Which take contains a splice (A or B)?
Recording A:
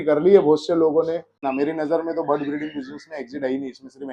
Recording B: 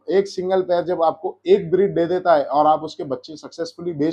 A